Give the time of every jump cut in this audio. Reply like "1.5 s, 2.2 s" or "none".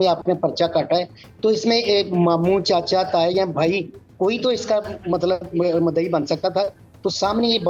none